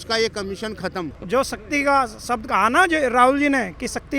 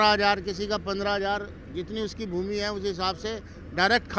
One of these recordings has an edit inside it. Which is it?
first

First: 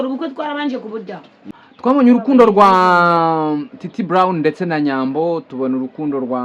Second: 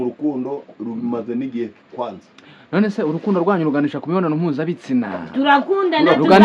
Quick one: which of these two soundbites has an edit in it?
first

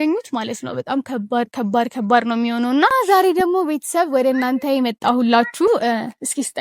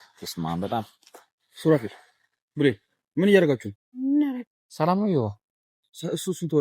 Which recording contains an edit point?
first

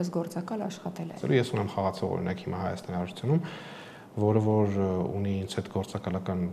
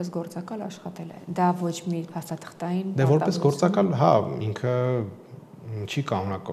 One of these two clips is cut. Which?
first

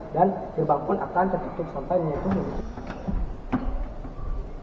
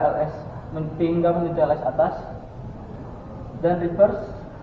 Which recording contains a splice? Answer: first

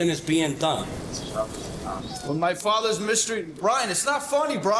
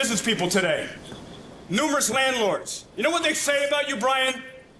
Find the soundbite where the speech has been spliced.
first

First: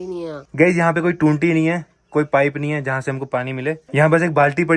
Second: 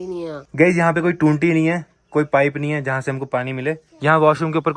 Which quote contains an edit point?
second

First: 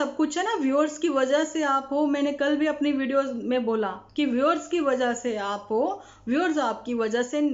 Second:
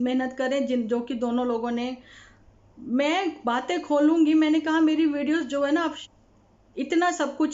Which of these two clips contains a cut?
second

